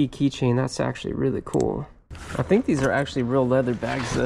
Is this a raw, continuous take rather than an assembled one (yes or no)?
no